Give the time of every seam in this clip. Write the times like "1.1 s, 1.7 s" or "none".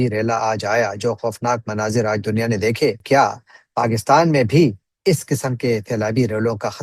3.0 s